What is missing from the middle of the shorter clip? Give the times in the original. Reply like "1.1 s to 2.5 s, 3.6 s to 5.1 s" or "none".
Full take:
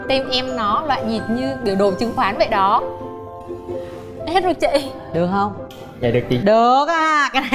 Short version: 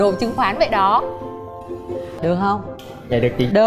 3.9 s to 5.0 s